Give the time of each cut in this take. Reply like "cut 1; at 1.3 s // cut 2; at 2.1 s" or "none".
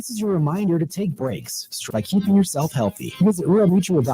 cut 1; at 2.0 s